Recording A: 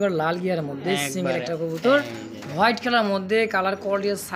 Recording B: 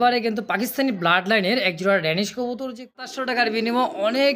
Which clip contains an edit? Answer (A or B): B